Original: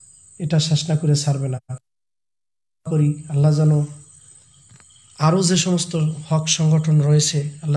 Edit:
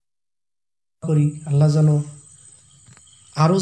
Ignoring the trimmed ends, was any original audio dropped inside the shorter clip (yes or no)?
no